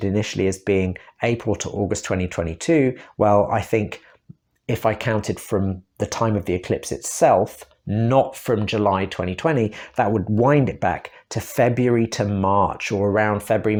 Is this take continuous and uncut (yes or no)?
yes